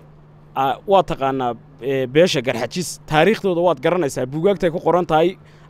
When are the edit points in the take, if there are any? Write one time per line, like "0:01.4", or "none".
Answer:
none